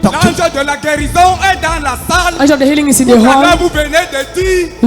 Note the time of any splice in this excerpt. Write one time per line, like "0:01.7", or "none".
none